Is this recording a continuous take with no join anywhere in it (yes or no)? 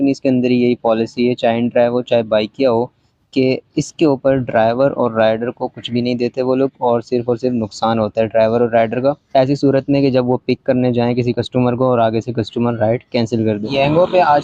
yes